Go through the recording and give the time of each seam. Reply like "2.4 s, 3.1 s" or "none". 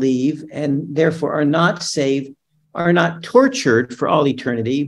none